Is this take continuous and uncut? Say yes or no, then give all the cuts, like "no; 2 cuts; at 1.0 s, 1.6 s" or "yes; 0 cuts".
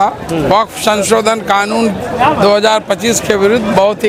yes; 0 cuts